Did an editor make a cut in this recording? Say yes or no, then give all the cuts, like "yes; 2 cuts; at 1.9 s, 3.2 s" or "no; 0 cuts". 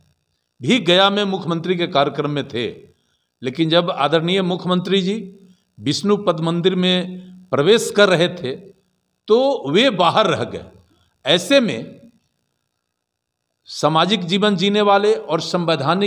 no; 0 cuts